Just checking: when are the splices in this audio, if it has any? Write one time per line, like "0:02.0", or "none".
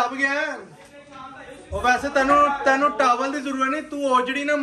none